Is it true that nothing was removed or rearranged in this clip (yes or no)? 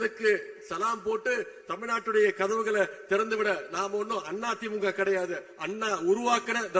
yes